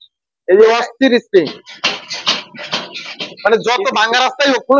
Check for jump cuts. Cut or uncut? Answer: uncut